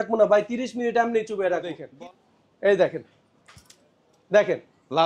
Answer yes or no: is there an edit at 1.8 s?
yes